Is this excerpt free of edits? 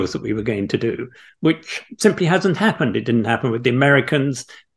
yes; 0 cuts

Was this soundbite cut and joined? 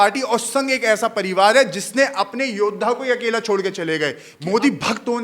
yes; 1 cut; at 4.3 s

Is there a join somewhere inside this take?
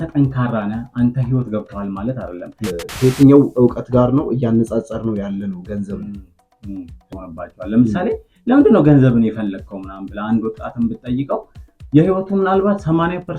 yes; 2 cuts; at 2.7 s, 7.0 s

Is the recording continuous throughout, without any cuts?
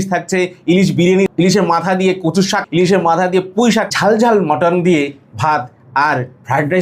no; 3 cuts; at 1.3 s, 2.6 s, 3.9 s

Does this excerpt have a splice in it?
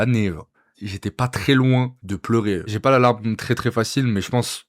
yes; 1 cut; at 2.6 s

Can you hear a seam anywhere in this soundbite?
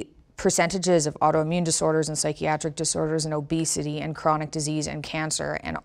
no; 0 cuts

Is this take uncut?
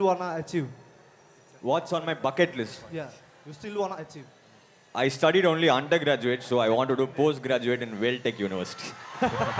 yes; 0 cuts

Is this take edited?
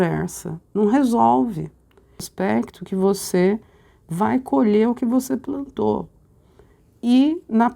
yes; 1 cut; at 2.2 s

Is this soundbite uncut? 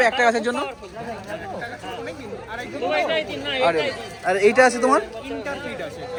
yes; 0 cuts

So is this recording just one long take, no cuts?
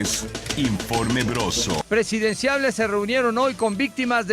no; 1 cut; at 1.8 s

